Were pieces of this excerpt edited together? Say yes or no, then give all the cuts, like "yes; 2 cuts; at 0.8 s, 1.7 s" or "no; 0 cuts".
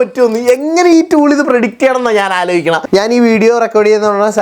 yes; 1 cut; at 2.8 s